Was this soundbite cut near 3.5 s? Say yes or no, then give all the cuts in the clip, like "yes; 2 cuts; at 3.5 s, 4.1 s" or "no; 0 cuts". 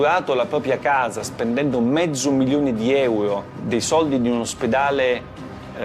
yes; 1 cut; at 3.5 s